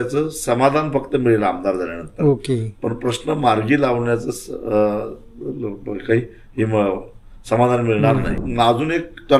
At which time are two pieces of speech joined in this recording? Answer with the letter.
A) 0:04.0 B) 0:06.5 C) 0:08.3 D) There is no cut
C